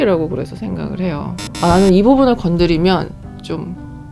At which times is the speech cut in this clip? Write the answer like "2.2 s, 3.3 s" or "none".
1.4 s